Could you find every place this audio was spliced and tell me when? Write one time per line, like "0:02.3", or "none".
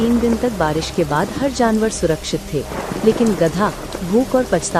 none